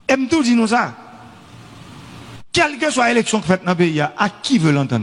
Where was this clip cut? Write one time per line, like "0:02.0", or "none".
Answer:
none